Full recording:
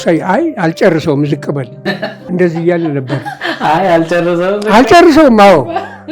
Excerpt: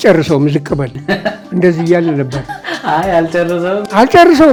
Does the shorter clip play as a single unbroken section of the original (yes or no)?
yes